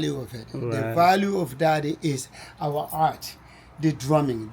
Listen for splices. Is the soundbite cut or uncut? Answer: uncut